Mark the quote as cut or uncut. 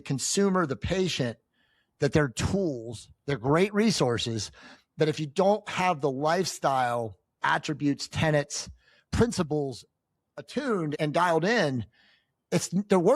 cut